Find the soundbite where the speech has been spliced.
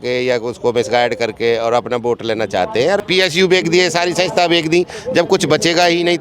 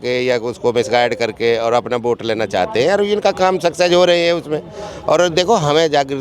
first; 1 cut; at 3.0 s

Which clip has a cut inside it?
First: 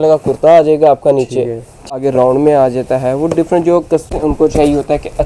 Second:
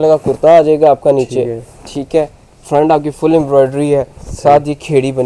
first; 2 cuts; at 2.0 s, 4.2 s

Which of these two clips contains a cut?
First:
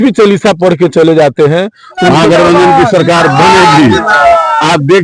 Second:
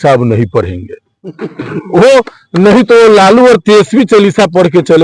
first; 1 cut; at 2.1 s

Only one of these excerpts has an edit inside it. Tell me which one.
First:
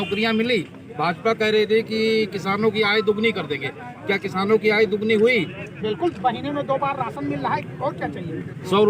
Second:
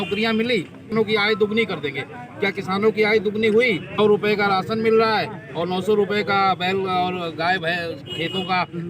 second; 2 cuts; at 0.8 s, 4.0 s

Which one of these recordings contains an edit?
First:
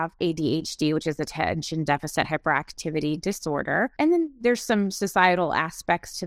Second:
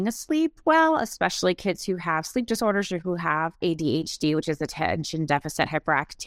first; 1 cut; at 3.9 s

